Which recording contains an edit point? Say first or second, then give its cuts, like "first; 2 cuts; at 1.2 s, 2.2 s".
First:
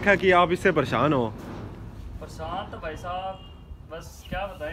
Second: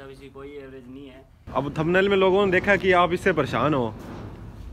second; 1 cut; at 1.5 s